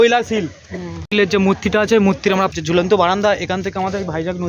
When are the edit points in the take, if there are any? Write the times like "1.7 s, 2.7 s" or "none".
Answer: 0.9 s, 2.5 s